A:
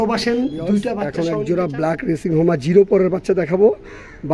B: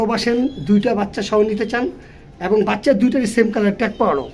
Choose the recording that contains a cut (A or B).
A